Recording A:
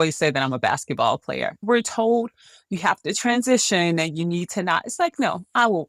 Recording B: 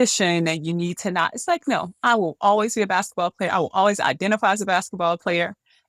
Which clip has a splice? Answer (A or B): A